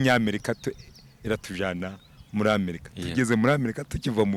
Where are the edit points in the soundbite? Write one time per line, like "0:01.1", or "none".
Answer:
none